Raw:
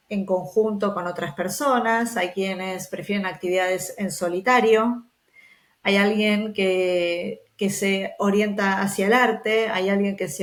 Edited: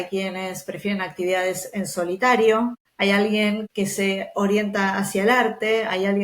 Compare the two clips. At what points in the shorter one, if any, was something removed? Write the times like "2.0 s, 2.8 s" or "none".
2.8 s, 3.6 s